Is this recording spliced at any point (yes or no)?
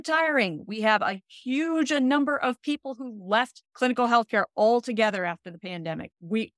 no